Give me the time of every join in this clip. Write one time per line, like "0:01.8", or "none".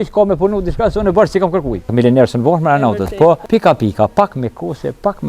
0:01.9
0:03.4